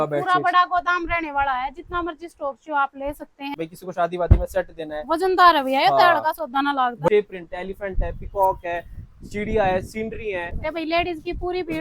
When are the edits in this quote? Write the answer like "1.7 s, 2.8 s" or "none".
3.5 s, 7.1 s, 10.5 s